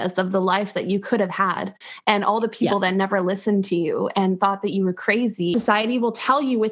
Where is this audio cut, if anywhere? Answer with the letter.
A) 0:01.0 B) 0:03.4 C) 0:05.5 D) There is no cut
C